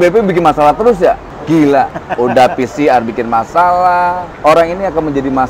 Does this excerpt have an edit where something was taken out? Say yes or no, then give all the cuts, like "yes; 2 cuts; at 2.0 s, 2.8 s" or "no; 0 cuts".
yes; 3 cuts; at 1.3 s, 2.0 s, 4.3 s